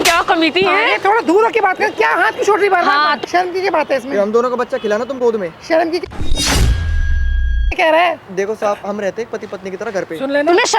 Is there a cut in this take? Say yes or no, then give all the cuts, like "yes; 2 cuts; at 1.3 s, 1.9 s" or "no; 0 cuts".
yes; 3 cuts; at 3.2 s, 6.0 s, 7.8 s